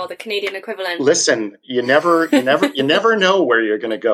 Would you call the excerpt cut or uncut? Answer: uncut